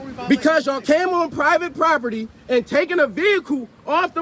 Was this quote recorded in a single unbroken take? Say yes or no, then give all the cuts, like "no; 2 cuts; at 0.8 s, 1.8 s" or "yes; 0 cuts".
yes; 0 cuts